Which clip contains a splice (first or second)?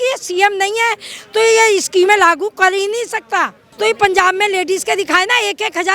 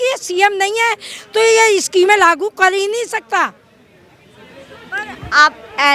first